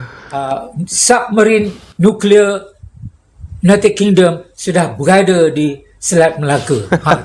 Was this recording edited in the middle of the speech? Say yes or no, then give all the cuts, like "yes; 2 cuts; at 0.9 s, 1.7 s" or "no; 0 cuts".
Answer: no; 0 cuts